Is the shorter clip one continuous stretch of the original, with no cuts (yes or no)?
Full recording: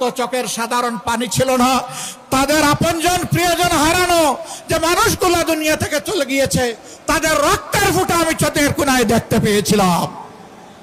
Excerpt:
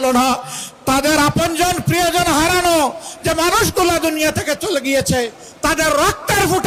yes